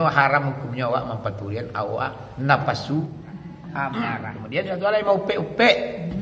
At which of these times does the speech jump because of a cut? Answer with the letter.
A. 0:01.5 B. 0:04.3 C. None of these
B